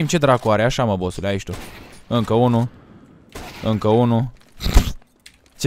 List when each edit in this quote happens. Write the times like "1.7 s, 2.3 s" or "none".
none